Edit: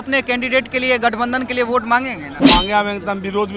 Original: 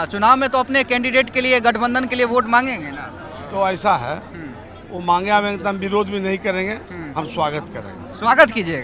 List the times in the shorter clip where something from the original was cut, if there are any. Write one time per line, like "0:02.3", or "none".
0:02.3